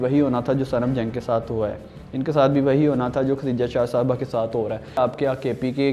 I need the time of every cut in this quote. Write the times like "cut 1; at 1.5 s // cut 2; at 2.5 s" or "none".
cut 1; at 5.0 s